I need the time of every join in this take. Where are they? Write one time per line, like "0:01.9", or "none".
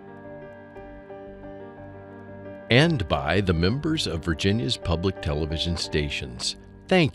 0:02.7